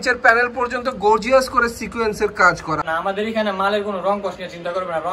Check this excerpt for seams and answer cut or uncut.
cut